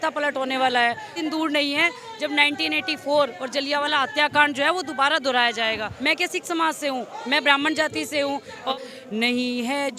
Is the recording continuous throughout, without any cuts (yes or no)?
no